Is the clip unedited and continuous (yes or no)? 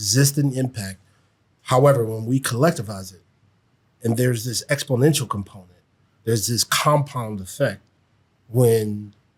yes